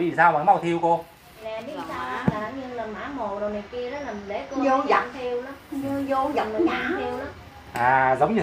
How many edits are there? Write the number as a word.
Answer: one